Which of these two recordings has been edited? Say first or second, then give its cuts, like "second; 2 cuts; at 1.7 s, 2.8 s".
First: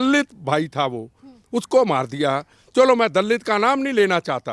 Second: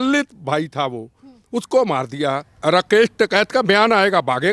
second; 1 cut; at 2.5 s